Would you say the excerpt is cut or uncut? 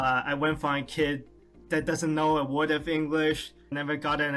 uncut